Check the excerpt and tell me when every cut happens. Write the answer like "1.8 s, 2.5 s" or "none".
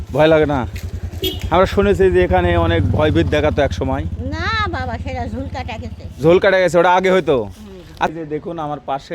8.1 s